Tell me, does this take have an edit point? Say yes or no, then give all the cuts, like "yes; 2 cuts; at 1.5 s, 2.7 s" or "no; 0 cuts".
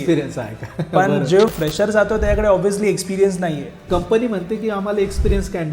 yes; 2 cuts; at 1.5 s, 3.7 s